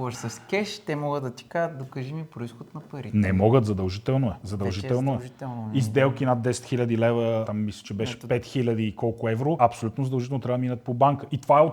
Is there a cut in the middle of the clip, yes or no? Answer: no